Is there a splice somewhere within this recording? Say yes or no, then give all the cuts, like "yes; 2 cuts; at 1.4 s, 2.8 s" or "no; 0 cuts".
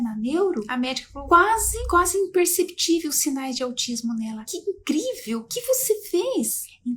no; 0 cuts